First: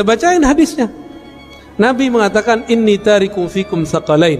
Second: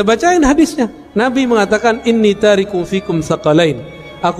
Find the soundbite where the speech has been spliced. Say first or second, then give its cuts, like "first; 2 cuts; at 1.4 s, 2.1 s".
second; 1 cut; at 1.0 s